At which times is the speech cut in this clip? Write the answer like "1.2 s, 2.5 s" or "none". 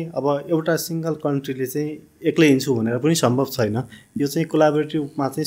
none

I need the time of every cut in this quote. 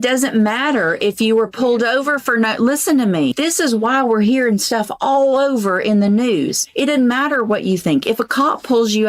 3.3 s, 6.6 s

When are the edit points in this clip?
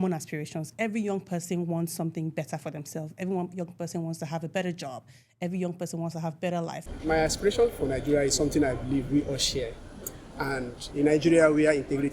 6.8 s

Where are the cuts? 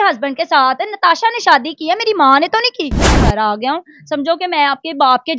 3.3 s

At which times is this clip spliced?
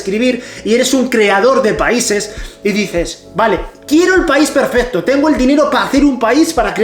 none

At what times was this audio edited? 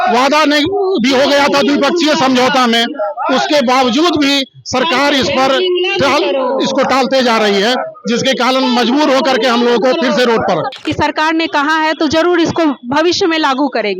10.7 s

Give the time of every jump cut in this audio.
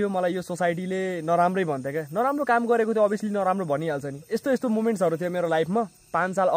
4.4 s

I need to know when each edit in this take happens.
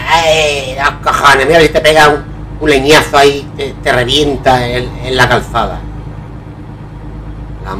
6.2 s

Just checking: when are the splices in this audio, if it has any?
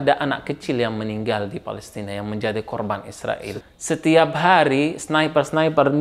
3.4 s

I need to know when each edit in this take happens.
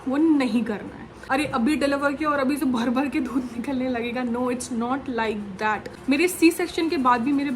1.1 s, 6.0 s

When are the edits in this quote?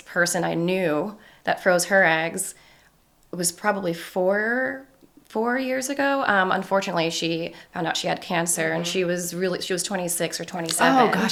none

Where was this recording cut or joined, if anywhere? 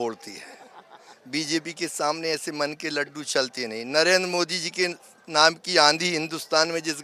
none

